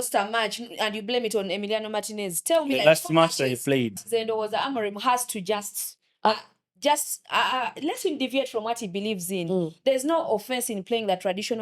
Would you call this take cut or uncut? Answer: cut